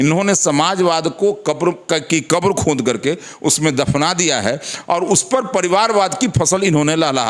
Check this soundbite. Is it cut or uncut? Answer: uncut